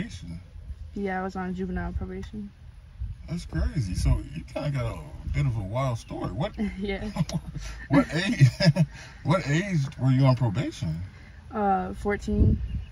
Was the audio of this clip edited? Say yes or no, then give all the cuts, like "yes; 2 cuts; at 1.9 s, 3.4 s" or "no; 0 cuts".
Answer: no; 0 cuts